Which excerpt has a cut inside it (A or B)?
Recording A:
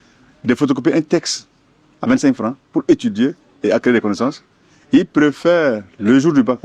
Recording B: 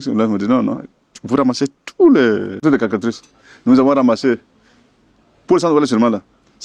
B